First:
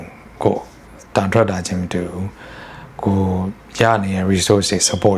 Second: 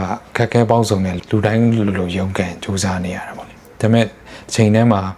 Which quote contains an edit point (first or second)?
second